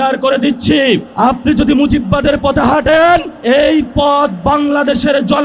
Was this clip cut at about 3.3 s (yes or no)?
yes